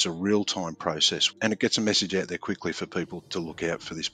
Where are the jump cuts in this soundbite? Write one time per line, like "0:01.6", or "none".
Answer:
0:01.3
0:03.2